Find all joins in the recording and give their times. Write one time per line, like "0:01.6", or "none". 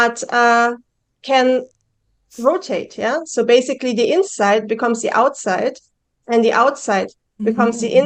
none